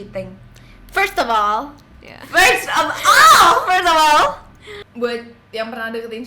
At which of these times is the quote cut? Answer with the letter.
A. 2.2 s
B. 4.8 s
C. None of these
B